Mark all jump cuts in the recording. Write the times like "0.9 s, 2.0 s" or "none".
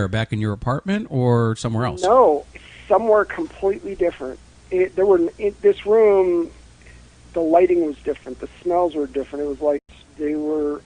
none